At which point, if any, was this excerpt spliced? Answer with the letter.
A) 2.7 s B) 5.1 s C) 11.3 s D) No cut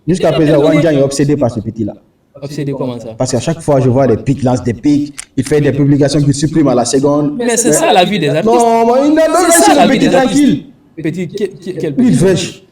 D